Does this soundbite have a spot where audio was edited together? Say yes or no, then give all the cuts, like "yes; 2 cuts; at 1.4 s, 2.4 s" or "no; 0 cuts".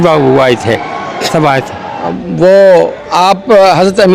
yes; 1 cut; at 2.2 s